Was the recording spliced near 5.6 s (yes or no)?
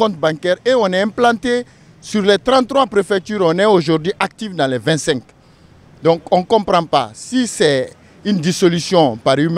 no